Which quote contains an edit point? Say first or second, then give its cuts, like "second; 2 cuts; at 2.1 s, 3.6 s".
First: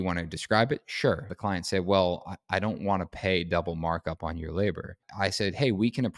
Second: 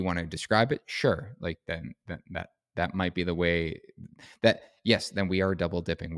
first; 2 cuts; at 1.3 s, 5.0 s